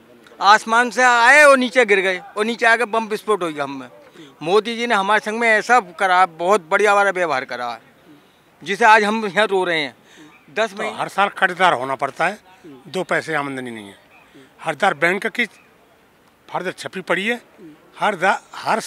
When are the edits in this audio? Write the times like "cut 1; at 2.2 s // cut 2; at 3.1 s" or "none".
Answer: cut 1; at 10.7 s